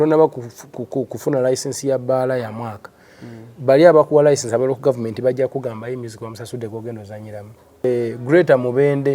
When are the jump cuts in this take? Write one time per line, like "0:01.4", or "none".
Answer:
0:07.8